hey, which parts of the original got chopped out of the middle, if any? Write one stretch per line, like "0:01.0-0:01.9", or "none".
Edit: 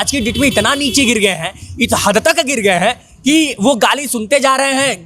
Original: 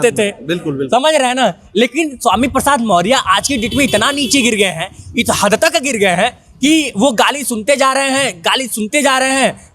none